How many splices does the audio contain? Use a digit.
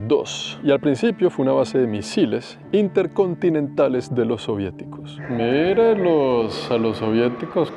1